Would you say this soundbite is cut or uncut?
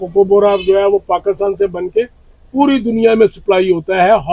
uncut